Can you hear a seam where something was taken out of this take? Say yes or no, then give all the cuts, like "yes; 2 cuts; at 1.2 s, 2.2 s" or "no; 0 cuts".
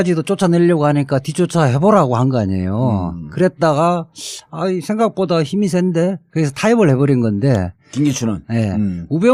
no; 0 cuts